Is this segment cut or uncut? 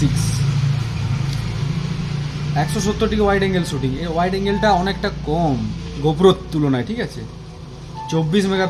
uncut